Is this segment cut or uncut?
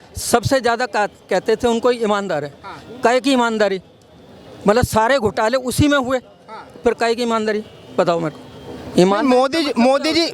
uncut